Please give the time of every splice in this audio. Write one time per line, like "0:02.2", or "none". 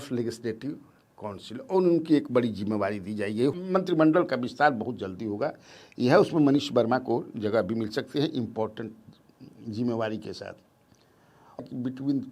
0:03.6
0:11.6